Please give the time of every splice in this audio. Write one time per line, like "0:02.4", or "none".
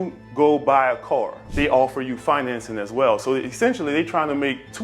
0:01.4